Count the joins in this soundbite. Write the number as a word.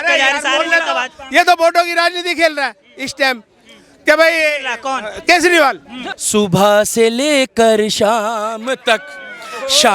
one